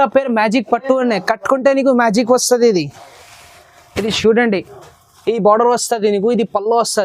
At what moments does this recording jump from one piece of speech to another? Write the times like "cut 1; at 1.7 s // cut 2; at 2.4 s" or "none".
none